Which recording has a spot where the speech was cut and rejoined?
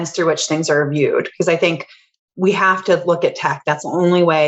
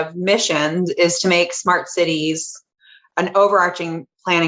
second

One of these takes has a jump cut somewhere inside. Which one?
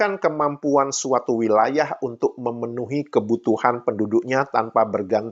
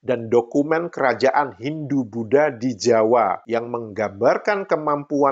second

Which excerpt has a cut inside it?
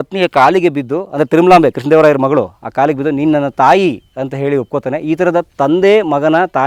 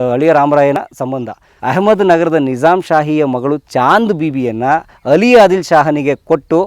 second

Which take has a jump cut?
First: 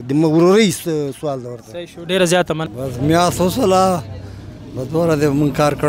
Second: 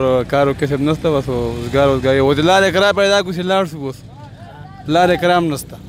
first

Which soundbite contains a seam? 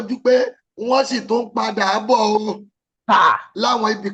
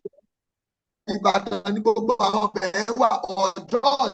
second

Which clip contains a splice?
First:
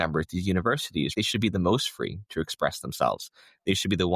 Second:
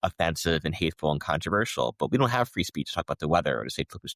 first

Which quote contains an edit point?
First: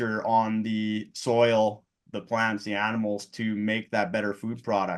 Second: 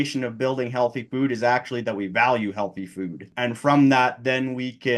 second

